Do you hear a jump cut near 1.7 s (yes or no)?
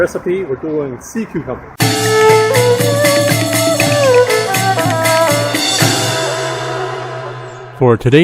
yes